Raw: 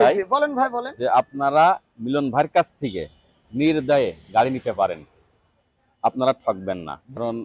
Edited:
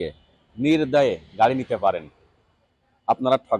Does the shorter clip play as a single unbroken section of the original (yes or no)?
yes